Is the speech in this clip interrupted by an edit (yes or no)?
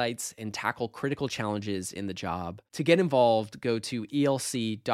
no